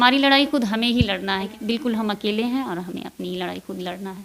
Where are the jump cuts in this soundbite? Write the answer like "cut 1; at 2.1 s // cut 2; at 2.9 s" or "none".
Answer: cut 1; at 1.5 s

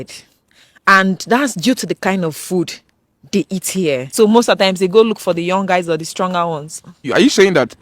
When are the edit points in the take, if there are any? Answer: cut 1; at 4.1 s // cut 2; at 7.1 s

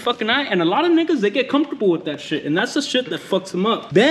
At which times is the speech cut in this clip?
none

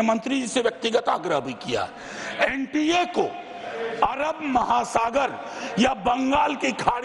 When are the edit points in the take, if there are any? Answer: none

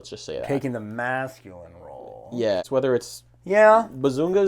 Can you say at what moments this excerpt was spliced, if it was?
cut 1; at 2.6 s

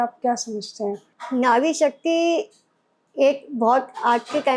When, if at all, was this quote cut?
cut 1; at 1.1 s

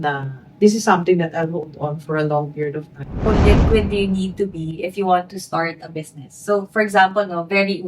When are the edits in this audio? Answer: cut 1; at 3.3 s

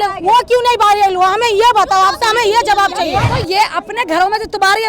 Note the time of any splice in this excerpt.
cut 1; at 3.3 s

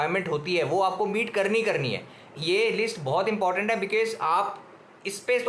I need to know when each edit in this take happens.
cut 1; at 2.4 s

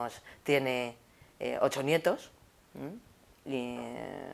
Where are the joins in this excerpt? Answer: cut 1; at 2.0 s

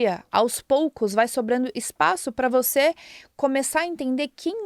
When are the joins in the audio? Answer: none

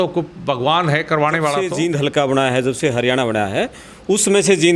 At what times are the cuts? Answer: cut 1; at 1.7 s

